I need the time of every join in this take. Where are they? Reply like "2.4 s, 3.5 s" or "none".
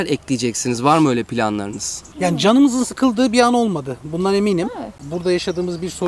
2.1 s, 5.1 s